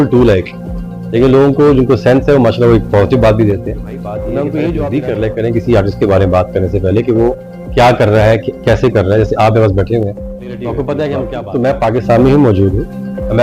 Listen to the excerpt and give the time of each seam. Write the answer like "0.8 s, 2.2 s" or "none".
4.8 s, 11.4 s